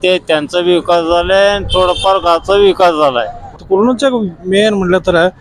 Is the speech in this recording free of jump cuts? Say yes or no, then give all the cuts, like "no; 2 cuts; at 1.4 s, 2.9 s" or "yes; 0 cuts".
no; 1 cut; at 3.5 s